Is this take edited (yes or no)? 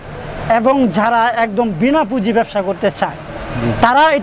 no